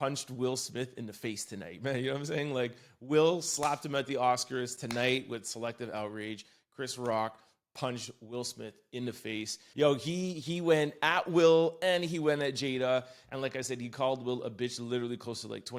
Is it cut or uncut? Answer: cut